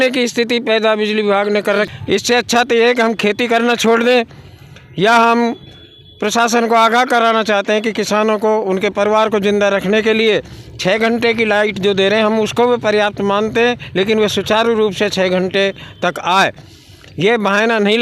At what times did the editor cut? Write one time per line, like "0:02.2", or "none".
none